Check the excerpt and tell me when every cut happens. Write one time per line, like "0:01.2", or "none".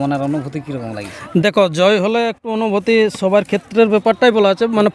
none